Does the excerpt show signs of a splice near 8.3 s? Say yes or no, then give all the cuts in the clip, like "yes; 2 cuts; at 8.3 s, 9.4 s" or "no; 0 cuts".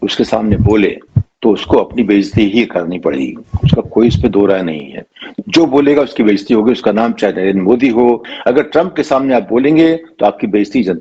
yes; 1 cut; at 8.3 s